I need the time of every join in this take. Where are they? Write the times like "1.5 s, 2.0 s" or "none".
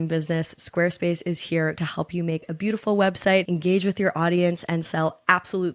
none